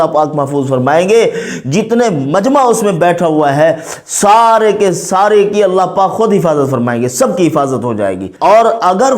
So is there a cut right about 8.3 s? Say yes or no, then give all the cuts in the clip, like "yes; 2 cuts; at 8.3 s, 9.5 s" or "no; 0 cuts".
yes; 1 cut; at 8.3 s